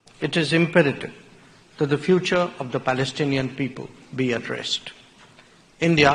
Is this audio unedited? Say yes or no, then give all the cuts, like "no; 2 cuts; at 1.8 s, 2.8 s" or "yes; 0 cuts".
yes; 0 cuts